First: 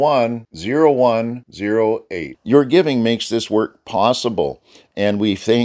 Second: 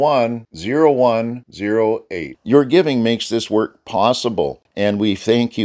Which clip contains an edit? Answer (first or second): second